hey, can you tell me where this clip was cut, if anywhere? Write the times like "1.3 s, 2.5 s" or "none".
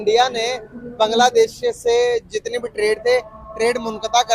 none

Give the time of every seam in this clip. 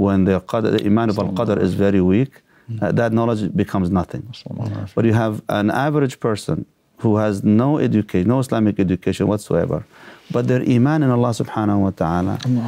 none

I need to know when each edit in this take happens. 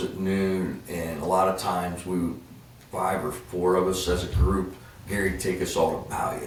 none

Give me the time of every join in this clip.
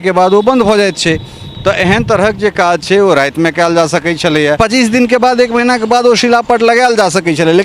4.6 s

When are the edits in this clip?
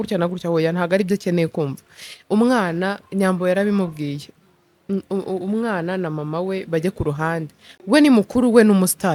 none

